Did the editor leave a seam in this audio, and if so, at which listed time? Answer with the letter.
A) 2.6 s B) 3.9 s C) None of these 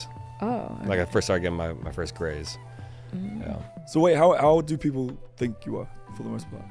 B